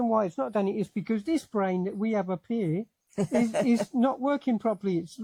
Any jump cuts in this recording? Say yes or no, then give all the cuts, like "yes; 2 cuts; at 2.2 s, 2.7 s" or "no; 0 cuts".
no; 0 cuts